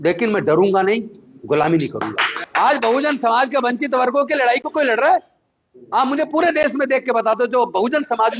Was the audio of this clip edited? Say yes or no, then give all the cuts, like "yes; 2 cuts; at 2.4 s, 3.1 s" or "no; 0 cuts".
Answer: yes; 1 cut; at 2.4 s